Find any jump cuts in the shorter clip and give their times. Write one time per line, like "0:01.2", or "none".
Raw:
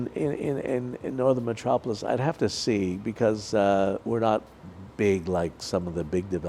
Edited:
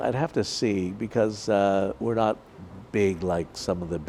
none